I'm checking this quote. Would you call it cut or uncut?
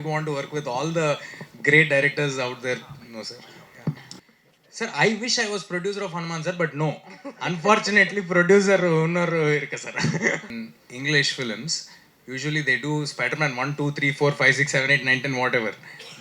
cut